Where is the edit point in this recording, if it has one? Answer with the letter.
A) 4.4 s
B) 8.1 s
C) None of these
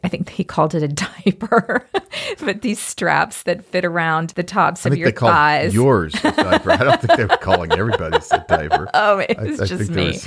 A